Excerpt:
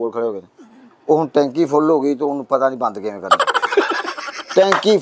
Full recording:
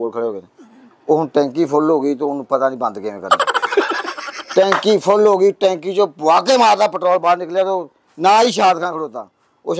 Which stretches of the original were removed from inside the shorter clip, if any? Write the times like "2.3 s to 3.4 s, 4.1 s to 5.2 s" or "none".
none